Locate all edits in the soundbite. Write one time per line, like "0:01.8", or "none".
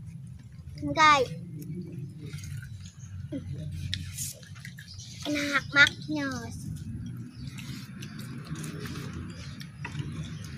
none

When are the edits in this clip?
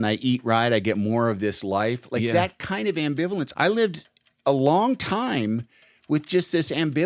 0:03.5

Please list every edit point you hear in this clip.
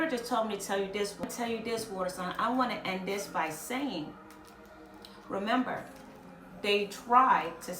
0:01.2

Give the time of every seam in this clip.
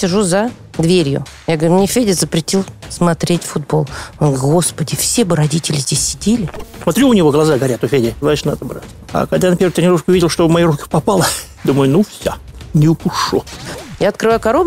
0:06.7
0:08.2
0:13.6

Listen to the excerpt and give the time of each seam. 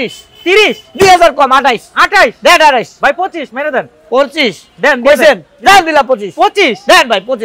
none

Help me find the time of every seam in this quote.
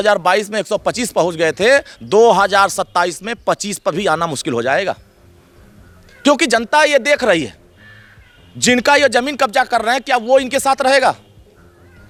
none

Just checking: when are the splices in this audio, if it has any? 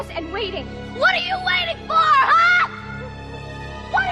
none

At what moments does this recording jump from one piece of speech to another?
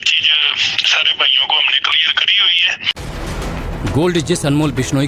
0:01.1

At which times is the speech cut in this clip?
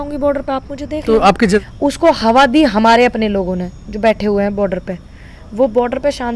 0:01.6

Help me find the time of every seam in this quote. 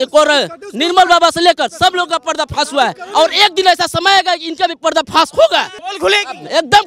0:05.9

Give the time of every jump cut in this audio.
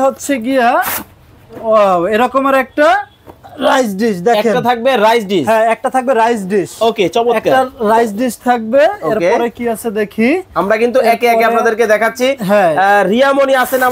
none

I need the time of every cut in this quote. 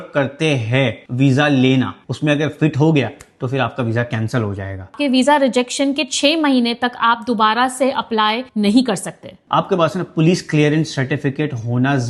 0:02.0
0:05.0
0:09.4

